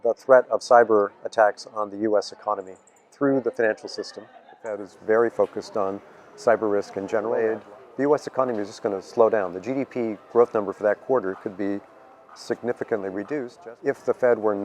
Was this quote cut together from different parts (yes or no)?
yes